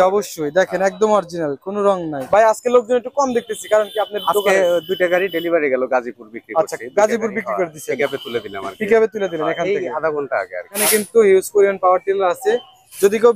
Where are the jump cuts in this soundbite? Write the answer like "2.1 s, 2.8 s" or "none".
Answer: 2.2 s, 10.8 s